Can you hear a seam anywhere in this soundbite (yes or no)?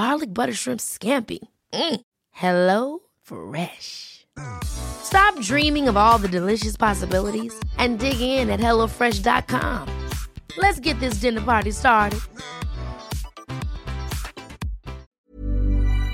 yes